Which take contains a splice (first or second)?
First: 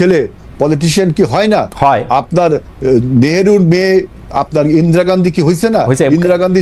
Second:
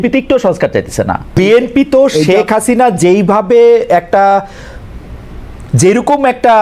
second